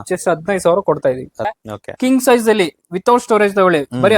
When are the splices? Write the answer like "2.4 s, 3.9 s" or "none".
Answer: 1.6 s